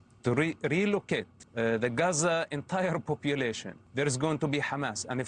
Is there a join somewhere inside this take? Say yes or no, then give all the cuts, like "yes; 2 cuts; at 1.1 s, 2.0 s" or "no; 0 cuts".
yes; 2 cuts; at 1.4 s, 3.7 s